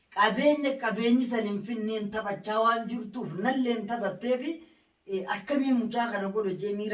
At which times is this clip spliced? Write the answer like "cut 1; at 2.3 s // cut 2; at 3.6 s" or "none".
none